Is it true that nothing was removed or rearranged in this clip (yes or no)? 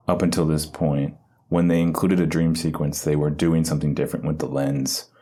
yes